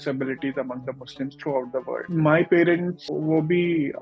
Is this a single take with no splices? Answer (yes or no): no